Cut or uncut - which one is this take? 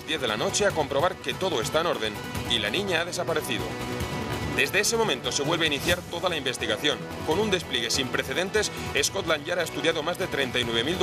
uncut